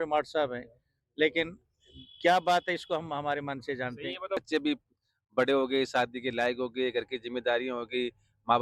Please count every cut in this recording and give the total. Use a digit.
1